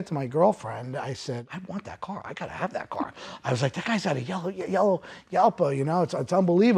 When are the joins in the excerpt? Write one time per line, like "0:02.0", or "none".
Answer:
0:01.5